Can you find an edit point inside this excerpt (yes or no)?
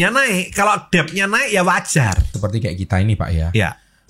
yes